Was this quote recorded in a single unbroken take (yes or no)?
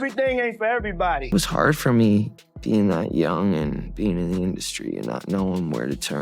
no